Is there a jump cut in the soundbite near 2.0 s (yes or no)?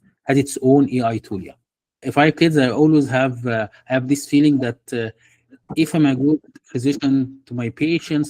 yes